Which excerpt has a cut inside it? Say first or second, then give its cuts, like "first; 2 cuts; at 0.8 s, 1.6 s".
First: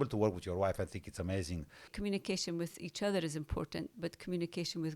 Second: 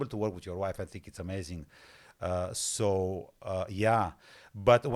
first; 1 cut; at 1.9 s